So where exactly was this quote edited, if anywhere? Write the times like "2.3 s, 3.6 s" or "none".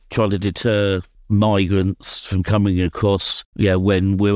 3.4 s